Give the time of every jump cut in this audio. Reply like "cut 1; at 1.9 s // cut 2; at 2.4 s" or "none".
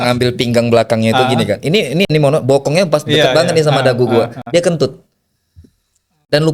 none